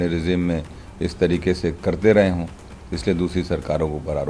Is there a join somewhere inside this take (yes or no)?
no